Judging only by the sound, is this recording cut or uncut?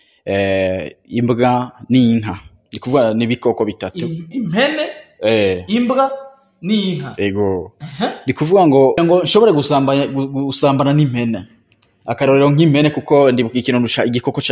cut